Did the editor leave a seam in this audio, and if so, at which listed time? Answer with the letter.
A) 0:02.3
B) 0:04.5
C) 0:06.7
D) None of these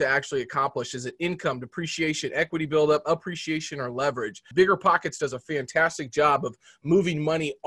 B